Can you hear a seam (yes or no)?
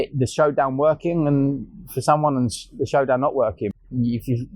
yes